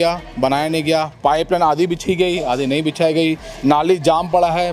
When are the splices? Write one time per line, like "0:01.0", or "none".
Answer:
none